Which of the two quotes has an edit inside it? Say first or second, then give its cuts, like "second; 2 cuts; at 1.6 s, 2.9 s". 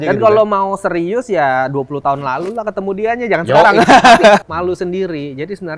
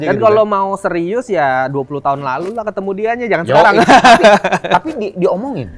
first; 1 cut; at 4.4 s